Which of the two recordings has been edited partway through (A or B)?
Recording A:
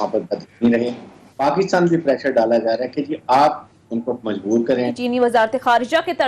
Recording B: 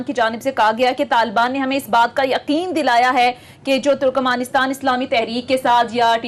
A